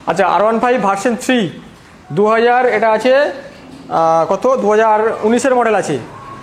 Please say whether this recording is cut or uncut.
uncut